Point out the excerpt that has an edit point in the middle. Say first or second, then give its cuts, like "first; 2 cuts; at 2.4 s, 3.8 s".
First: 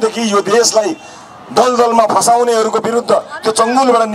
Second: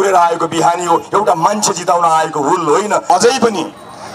second; 1 cut; at 3.0 s